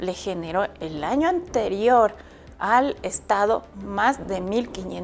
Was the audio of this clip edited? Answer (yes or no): no